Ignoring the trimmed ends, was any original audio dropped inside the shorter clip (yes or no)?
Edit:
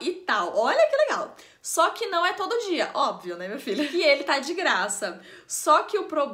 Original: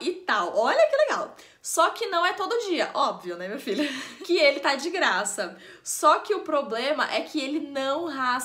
yes